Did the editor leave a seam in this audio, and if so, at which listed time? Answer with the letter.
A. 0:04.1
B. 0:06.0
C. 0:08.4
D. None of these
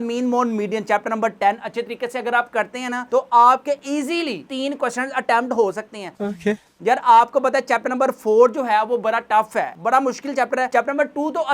D